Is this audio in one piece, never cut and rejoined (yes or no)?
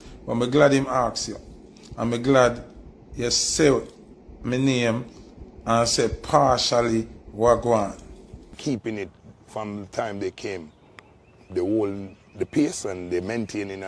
no